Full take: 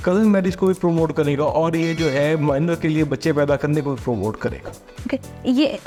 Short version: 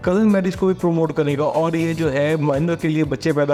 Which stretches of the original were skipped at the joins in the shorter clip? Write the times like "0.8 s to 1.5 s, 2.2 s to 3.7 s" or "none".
none